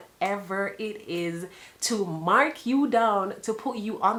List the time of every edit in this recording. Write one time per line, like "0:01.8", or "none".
none